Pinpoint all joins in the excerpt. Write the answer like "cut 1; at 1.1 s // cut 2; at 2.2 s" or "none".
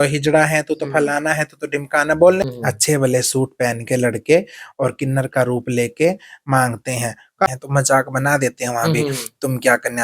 cut 1; at 2.4 s // cut 2; at 7.5 s